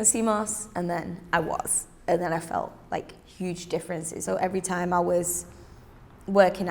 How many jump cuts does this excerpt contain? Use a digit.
1